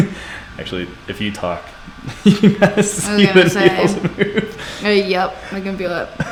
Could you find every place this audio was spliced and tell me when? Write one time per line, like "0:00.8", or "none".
none